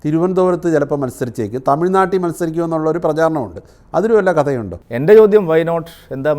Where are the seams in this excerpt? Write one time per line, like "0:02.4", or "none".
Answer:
0:04.7